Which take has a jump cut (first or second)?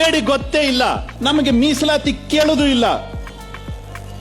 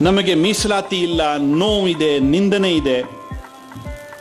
first